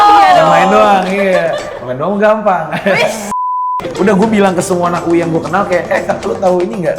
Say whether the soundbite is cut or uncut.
cut